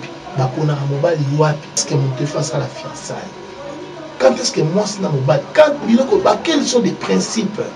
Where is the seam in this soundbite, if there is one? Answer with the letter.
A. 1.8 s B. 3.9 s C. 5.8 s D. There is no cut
A